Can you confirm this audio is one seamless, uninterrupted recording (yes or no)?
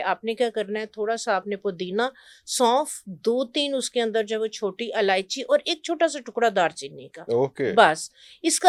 yes